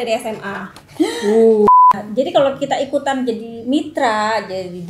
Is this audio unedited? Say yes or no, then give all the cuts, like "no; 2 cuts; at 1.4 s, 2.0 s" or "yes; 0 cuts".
no; 1 cut; at 1.7 s